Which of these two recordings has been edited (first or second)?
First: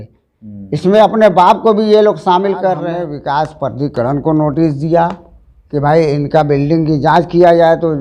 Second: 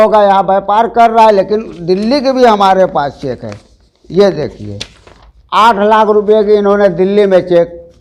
first